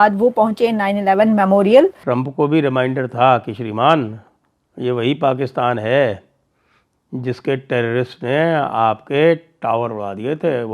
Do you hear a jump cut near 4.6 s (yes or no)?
no